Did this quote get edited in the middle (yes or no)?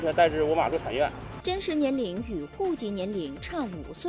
yes